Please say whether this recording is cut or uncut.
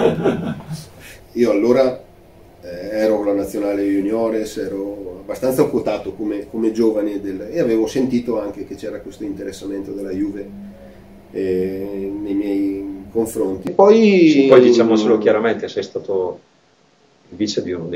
cut